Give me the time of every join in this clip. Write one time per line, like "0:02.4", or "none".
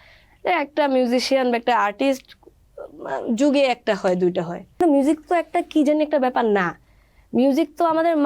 0:04.8